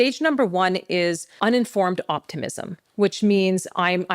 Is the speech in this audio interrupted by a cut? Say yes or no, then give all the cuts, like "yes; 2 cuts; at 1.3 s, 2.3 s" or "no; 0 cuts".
yes; 1 cut; at 1.3 s